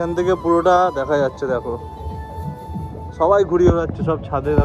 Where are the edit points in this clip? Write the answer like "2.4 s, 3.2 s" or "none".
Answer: none